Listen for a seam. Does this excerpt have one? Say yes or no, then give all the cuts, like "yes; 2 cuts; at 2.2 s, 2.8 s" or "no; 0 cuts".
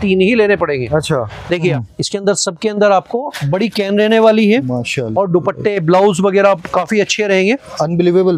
yes; 1 cut; at 1.7 s